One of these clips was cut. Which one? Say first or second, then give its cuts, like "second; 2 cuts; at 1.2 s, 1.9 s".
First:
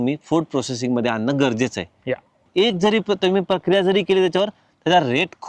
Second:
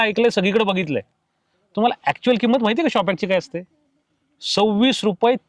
first; 1 cut; at 2.4 s